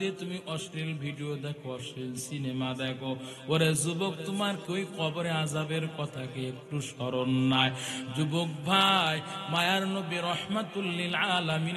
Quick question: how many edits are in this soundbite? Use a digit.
0